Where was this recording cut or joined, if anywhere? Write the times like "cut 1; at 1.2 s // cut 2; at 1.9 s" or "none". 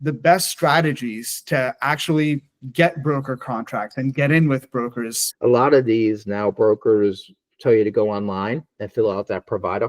cut 1; at 5.1 s

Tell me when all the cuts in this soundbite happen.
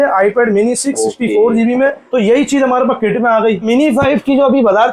cut 1; at 2.0 s // cut 2; at 3.7 s

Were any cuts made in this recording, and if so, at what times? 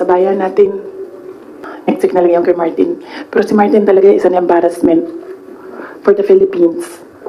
cut 1; at 1.6 s

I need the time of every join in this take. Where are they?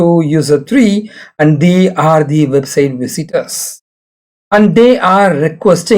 none

